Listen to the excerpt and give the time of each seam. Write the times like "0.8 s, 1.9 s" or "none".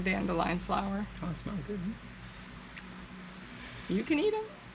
none